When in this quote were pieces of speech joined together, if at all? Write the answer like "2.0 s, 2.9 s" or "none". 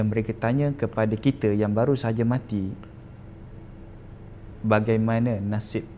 none